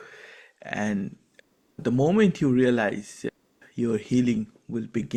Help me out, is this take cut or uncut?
uncut